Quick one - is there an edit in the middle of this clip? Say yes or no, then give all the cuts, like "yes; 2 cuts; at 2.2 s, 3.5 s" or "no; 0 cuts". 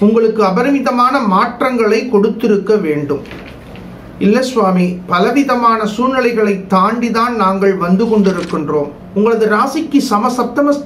yes; 1 cut; at 9.0 s